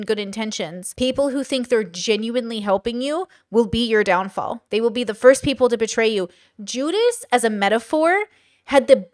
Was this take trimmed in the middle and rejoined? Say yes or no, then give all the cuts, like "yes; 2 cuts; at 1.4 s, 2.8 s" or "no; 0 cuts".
no; 0 cuts